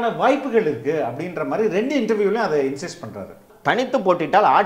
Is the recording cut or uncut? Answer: cut